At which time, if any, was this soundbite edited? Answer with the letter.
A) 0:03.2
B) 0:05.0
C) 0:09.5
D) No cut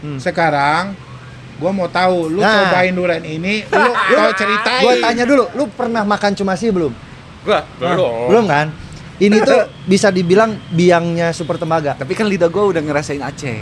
D